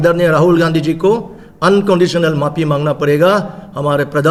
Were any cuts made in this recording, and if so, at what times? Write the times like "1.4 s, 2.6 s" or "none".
none